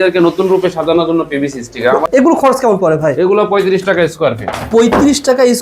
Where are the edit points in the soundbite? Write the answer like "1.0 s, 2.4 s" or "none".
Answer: 2.2 s